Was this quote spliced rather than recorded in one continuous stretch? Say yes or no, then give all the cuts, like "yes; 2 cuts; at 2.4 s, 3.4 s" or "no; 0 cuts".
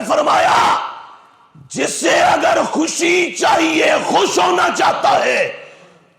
no; 0 cuts